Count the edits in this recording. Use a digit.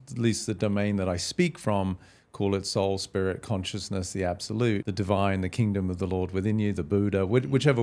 1